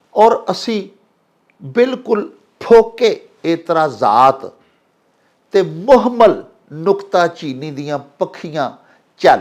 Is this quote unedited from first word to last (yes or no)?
yes